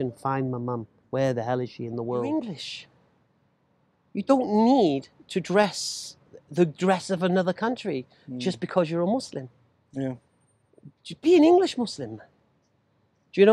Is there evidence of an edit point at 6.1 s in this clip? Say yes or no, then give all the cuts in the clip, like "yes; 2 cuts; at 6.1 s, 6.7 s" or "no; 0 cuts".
no; 1 cut; at 2.3 s